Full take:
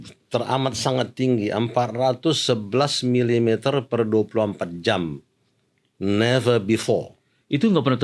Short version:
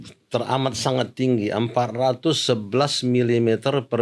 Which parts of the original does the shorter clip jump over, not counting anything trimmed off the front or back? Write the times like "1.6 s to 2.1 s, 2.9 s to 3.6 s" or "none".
none